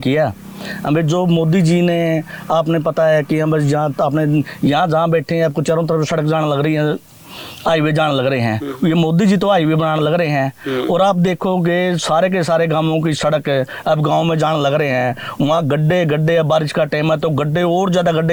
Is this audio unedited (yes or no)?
yes